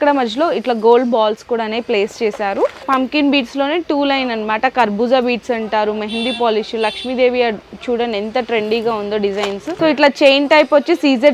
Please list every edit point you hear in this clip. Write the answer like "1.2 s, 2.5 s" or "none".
2.8 s, 9.6 s